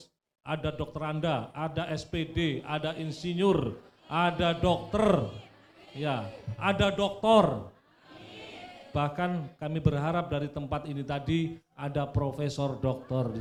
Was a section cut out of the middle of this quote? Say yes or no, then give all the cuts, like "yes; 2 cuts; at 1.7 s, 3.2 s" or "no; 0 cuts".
no; 0 cuts